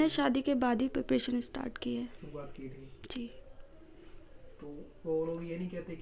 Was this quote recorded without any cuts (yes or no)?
yes